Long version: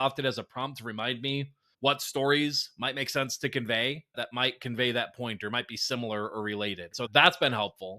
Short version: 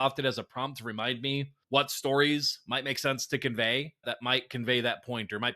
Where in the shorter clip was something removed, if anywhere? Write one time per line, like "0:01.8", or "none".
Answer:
0:01.6